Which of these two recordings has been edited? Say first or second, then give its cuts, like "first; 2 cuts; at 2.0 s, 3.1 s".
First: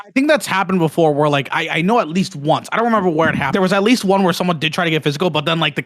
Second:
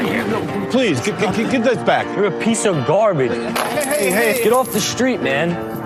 first; 1 cut; at 3.5 s